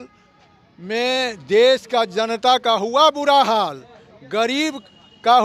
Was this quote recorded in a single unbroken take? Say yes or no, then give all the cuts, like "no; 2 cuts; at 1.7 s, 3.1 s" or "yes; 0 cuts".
yes; 0 cuts